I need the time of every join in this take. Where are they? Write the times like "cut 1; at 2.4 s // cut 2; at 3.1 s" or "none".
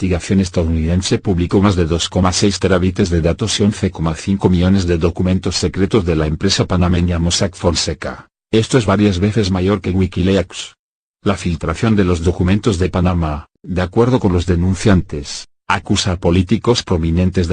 cut 1; at 10.0 s